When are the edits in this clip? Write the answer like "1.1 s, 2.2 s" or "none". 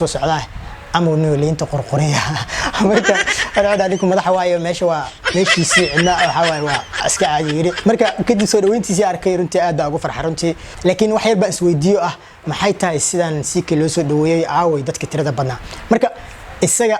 10.7 s